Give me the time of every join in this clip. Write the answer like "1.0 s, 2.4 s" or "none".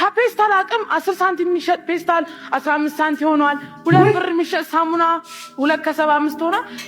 none